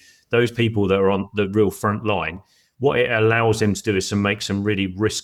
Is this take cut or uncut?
uncut